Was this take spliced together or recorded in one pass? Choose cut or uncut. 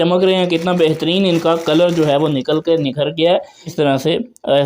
cut